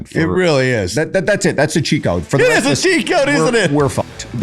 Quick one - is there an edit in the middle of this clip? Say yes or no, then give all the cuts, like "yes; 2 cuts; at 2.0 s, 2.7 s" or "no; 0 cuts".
no; 0 cuts